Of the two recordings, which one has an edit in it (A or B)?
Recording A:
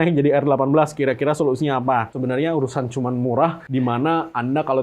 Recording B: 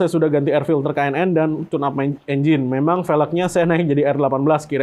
A